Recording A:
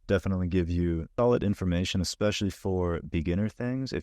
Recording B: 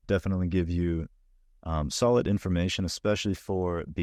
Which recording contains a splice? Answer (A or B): A